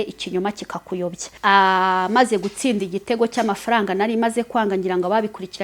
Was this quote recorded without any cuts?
no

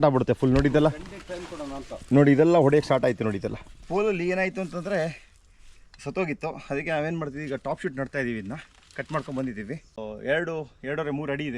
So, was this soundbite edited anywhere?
yes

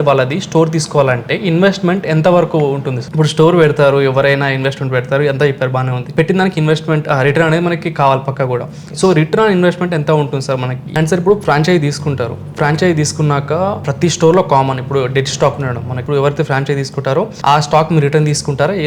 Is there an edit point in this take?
yes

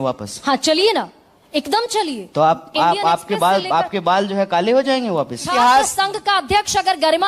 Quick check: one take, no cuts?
no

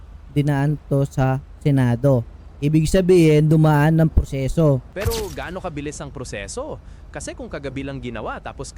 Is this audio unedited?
no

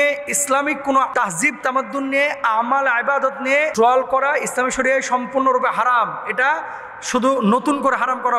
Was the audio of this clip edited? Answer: yes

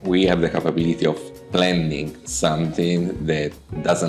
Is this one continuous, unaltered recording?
yes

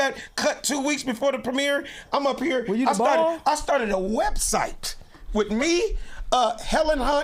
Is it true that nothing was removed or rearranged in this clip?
yes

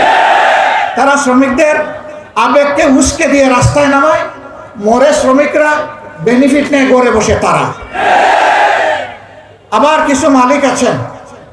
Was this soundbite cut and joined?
no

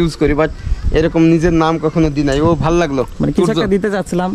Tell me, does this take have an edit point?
no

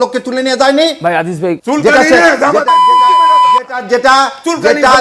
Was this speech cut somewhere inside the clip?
yes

